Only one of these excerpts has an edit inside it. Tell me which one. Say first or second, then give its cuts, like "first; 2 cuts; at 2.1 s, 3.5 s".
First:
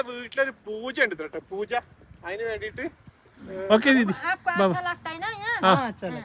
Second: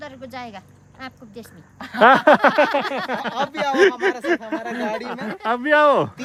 first; 1 cut; at 3.6 s